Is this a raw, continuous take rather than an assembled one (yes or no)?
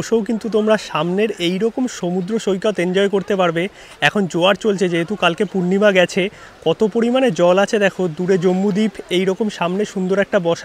yes